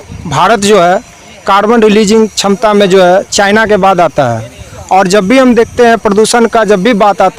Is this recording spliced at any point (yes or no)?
no